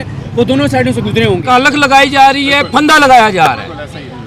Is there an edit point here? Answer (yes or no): yes